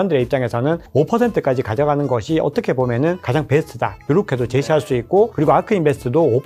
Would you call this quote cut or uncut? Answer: uncut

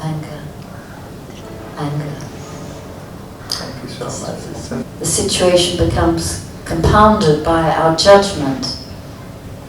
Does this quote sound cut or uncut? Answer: cut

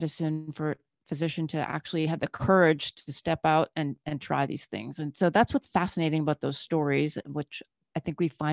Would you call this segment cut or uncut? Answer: uncut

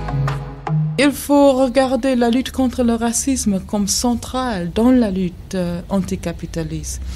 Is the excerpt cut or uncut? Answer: cut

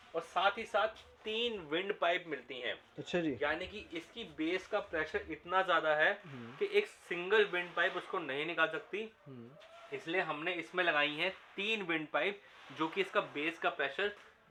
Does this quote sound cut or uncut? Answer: uncut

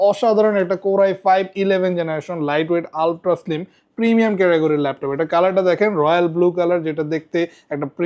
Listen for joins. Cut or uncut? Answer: uncut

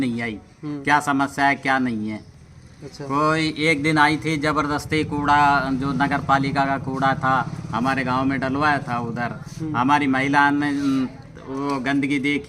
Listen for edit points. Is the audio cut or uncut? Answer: uncut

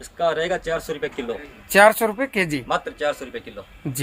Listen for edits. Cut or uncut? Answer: uncut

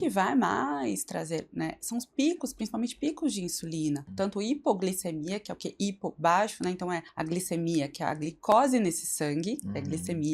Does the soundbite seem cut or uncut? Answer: cut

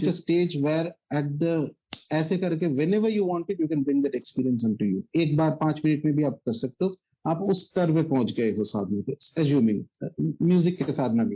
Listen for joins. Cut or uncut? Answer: uncut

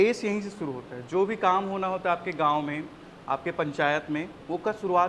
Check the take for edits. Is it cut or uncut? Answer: uncut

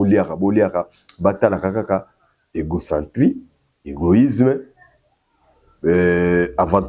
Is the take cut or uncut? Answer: uncut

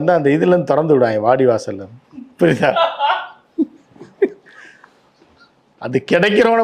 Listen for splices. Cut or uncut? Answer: uncut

